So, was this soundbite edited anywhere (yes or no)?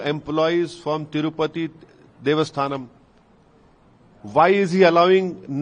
no